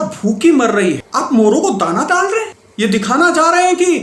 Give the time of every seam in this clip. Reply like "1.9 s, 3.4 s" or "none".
1.0 s, 2.6 s